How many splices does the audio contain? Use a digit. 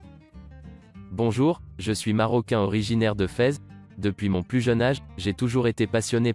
1